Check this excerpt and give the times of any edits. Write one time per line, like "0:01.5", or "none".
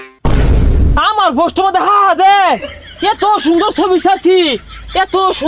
0:00.9